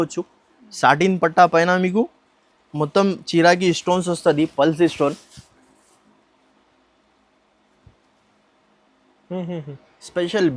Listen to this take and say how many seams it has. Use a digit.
0